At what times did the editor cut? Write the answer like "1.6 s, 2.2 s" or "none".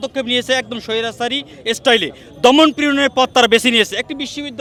none